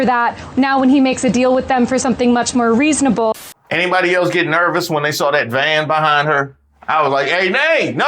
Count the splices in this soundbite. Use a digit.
1